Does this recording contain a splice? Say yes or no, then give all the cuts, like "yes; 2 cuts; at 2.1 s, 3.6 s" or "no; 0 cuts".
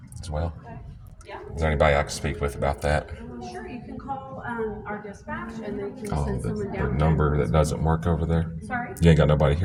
no; 0 cuts